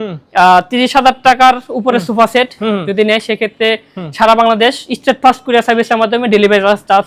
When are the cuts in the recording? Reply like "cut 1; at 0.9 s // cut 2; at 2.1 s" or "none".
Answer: none